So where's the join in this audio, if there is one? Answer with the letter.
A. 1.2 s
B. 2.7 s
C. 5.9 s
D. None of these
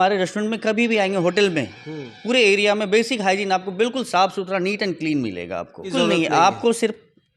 C